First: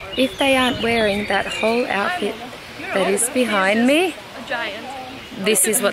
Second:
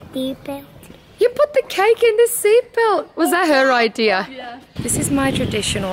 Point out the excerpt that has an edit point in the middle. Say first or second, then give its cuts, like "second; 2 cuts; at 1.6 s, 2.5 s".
second; 1 cut; at 4.8 s